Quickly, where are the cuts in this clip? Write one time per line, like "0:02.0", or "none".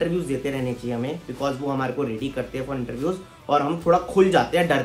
none